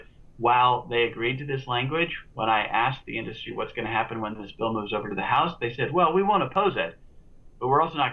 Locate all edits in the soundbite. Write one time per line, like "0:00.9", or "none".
none

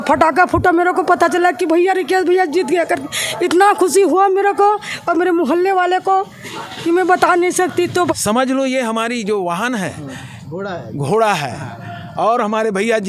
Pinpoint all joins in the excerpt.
0:08.1

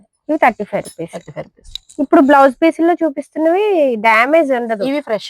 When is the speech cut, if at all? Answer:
none

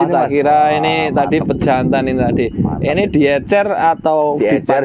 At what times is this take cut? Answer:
none

